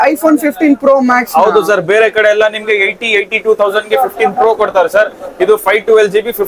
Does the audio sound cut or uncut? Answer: uncut